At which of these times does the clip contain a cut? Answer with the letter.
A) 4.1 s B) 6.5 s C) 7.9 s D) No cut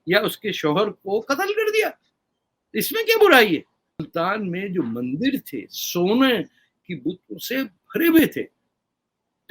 A